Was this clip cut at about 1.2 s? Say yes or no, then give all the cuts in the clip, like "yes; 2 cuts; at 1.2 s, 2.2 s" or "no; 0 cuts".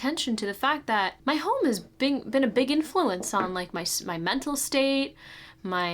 yes; 1 cut; at 1.2 s